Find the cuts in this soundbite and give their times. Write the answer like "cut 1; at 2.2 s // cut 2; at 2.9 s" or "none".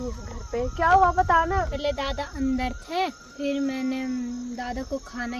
cut 1; at 1.7 s // cut 2; at 3.3 s